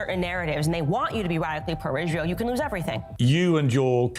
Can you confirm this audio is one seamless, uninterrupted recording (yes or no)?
no